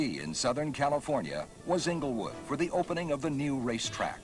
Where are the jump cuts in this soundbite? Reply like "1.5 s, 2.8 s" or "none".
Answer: 1.5 s